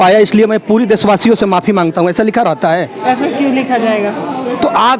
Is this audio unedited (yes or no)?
yes